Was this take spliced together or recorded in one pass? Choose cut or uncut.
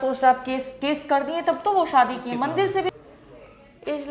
cut